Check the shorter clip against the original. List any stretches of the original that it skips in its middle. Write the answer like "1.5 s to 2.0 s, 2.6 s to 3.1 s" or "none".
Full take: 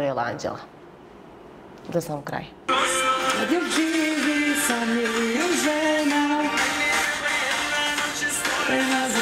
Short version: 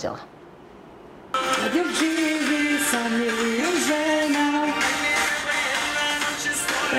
1.8 s to 3.1 s